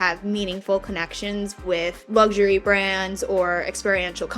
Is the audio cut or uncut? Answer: cut